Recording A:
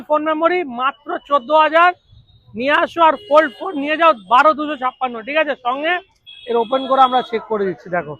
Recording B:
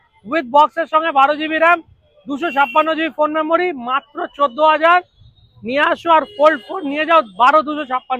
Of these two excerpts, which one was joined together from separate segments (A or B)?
A